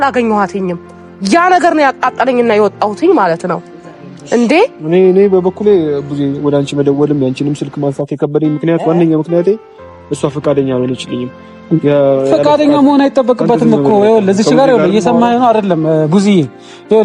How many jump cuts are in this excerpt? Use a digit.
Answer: 0